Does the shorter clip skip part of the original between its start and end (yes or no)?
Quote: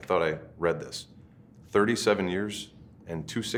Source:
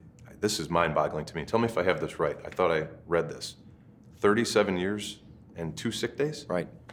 no